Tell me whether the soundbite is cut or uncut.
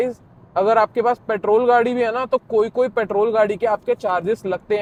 uncut